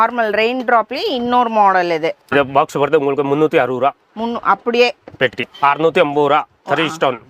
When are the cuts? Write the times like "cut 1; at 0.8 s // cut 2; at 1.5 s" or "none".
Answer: cut 1; at 2.3 s // cut 2; at 5.4 s